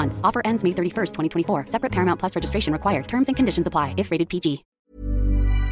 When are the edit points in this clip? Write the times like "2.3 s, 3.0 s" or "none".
4.7 s